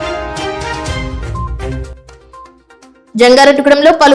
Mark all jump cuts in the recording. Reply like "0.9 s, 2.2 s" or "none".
1.3 s, 2.5 s